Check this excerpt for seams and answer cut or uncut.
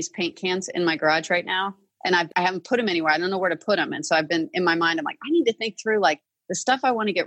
cut